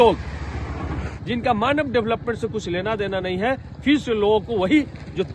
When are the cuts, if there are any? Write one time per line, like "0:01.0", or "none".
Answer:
0:01.1